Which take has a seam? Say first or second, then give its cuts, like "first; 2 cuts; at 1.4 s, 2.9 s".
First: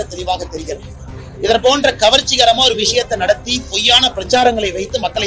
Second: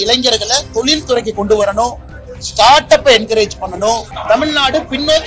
second; 1 cut; at 4.1 s